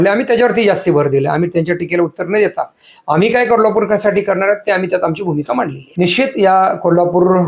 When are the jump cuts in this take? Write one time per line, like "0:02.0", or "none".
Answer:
0:05.8

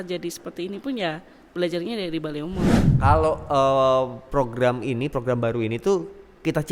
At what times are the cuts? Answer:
0:02.8

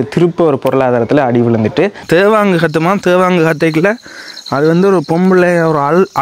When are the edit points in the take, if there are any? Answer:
0:02.0

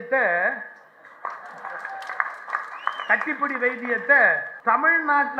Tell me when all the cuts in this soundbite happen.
0:04.5

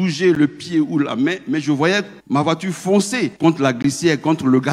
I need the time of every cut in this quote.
0:02.2
0:03.3

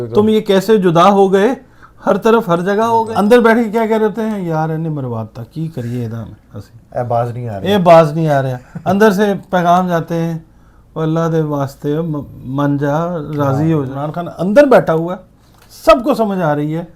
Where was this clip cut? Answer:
0:03.1
0:14.0

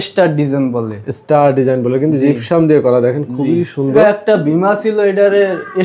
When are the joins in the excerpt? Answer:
0:04.0

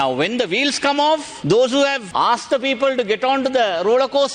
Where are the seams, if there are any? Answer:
0:01.3
0:02.0

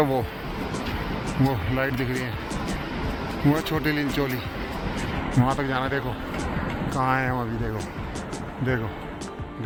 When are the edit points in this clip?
none

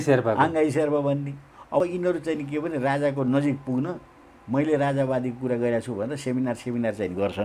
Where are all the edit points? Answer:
0:01.8

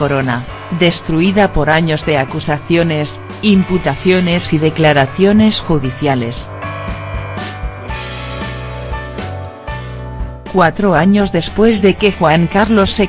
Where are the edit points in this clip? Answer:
0:08.1

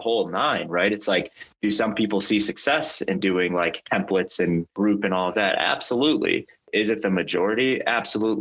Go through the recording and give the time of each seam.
0:01.4
0:04.7
0:06.7

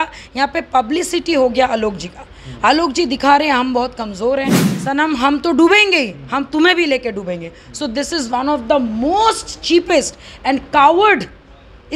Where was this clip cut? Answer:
0:04.7

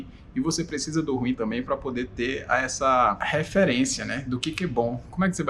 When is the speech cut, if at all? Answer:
0:03.2

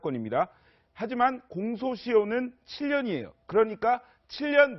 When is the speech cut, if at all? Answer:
0:03.5

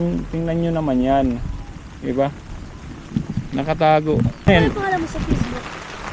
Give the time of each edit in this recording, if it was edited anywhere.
0:04.5

